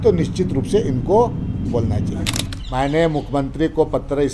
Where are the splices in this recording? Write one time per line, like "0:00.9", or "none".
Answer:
0:02.5